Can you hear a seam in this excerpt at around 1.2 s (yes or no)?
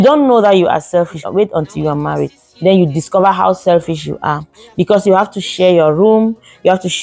yes